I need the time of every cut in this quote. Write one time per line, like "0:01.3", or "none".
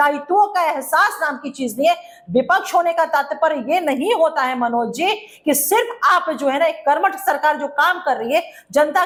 none